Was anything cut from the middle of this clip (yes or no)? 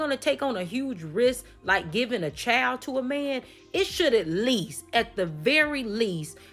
no